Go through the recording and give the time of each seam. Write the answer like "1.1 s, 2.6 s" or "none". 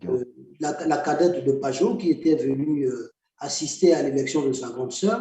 none